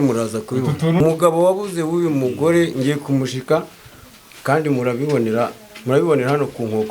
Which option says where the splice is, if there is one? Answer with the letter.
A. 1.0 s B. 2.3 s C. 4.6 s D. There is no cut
A